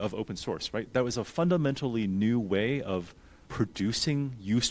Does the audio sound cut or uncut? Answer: cut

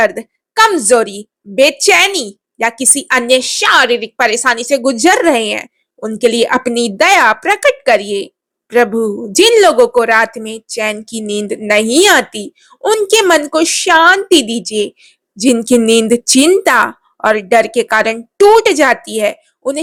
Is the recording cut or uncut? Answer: uncut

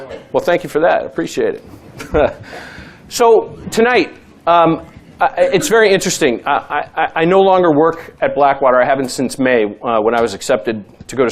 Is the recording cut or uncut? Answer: uncut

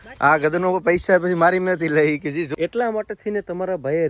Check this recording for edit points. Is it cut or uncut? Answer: cut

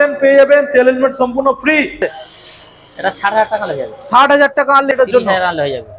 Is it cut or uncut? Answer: cut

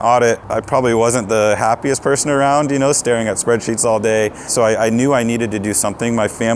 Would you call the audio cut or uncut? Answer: cut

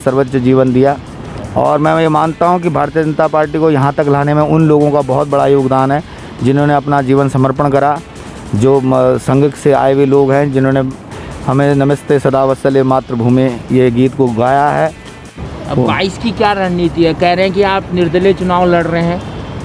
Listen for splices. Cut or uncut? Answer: cut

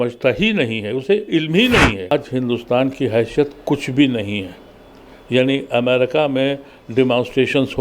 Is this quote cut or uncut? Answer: cut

